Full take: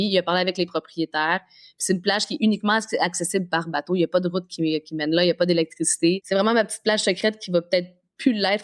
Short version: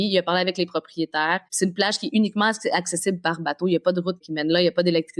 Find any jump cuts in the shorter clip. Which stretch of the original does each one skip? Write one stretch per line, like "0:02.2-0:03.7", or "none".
0:01.5-0:01.8
0:04.5-0:04.9